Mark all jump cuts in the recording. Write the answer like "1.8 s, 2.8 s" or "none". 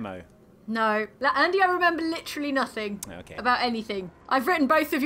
1.1 s, 4.3 s